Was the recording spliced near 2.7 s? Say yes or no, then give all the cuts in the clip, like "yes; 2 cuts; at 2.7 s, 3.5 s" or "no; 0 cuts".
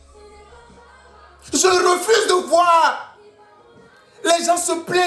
no; 1 cut; at 1.0 s